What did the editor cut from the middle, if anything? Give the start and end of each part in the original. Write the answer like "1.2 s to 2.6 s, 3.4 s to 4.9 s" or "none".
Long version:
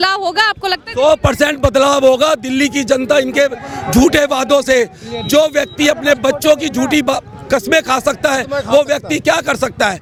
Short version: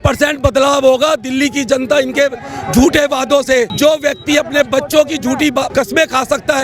4.9 s to 5.2 s, 7.2 s to 7.4 s